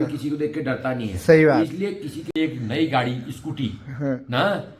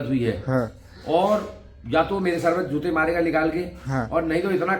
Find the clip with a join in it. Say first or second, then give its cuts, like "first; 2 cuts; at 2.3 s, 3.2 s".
first; 1 cut; at 2.3 s